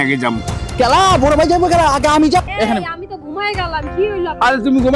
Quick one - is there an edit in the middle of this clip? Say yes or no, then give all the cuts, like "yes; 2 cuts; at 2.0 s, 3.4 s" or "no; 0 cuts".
yes; 1 cut; at 2.4 s